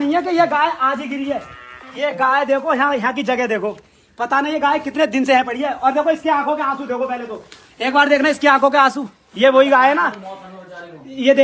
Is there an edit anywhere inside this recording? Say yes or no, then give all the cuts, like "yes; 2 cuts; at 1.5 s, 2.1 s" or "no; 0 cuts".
no; 0 cuts